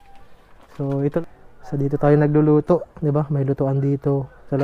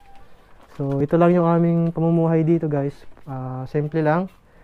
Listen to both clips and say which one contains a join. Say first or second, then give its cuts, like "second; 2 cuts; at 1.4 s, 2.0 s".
first; 1 cut; at 1.0 s